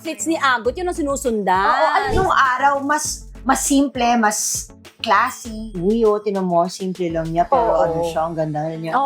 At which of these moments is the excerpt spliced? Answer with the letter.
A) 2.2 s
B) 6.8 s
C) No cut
A